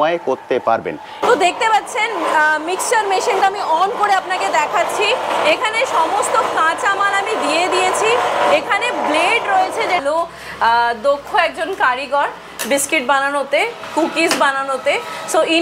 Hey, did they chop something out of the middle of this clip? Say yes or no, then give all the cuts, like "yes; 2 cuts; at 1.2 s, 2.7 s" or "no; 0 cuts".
yes; 2 cuts; at 1.2 s, 10.0 s